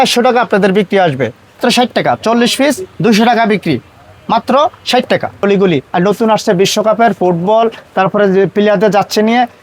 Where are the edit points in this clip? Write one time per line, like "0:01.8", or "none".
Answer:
0:01.6
0:05.4